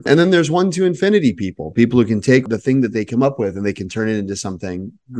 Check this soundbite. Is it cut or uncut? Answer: cut